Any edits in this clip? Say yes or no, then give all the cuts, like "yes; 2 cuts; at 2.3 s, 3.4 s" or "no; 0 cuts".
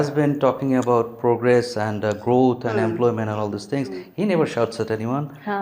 no; 0 cuts